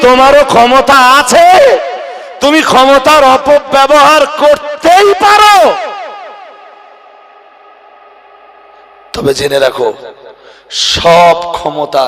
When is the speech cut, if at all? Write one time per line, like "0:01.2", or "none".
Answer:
none